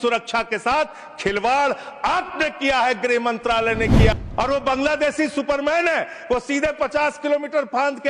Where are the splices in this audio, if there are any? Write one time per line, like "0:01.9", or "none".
0:04.1